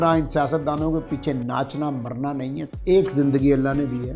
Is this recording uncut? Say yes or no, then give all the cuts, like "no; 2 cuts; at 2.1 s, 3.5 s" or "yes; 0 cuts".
no; 1 cut; at 2.7 s